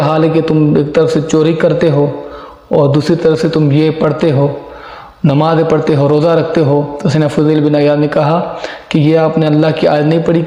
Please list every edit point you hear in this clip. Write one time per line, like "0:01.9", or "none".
none

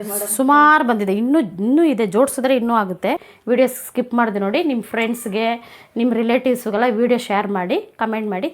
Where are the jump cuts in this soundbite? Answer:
0:03.3

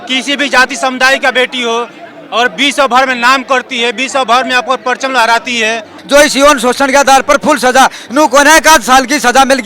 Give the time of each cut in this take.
0:06.0

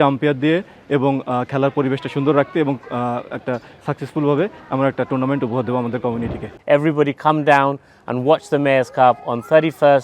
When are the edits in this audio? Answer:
0:06.5

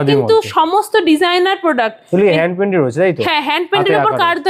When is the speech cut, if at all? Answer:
none

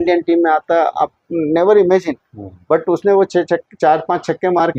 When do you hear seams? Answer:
none

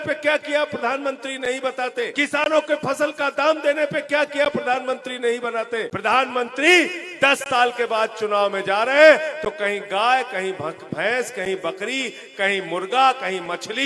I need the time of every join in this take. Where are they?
0:02.1
0:05.9

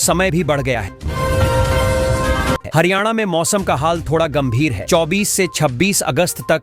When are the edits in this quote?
0:00.9
0:02.7

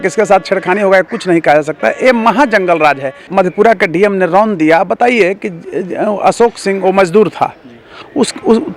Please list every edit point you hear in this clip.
0:03.2

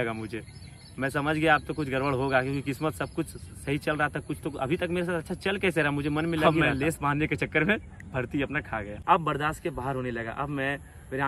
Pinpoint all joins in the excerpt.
0:06.4
0:09.0

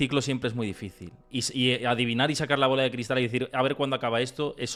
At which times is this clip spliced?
none

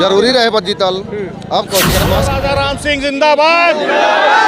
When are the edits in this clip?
0:02.3

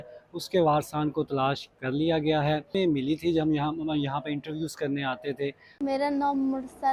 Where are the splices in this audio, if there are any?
0:02.7
0:05.7

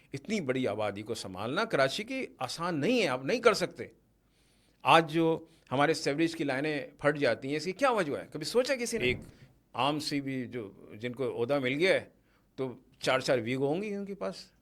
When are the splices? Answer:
0:09.0

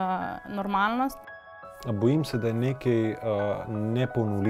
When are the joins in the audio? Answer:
0:01.4

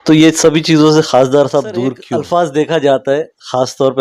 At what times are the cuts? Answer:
0:02.0

